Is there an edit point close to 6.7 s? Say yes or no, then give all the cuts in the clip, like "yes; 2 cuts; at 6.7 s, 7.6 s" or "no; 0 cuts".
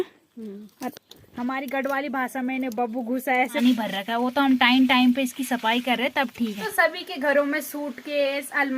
yes; 2 cuts; at 3.6 s, 6.7 s